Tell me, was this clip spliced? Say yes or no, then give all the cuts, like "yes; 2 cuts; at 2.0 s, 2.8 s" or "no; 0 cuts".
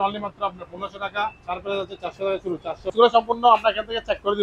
yes; 1 cut; at 2.8 s